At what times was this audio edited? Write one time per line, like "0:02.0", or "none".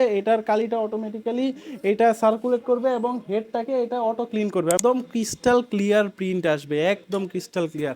0:04.8